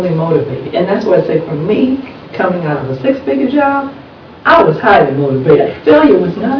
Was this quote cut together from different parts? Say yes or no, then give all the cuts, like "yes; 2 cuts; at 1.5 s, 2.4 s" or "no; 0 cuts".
no; 0 cuts